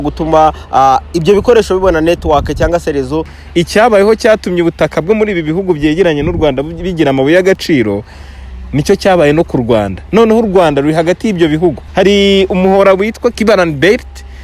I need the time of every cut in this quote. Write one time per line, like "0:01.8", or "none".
0:03.4
0:11.8
0:13.4